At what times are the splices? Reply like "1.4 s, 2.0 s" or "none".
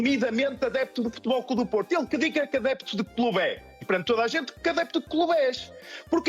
3.8 s